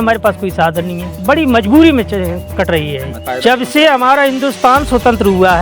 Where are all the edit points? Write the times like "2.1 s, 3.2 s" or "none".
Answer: 1.1 s, 3.1 s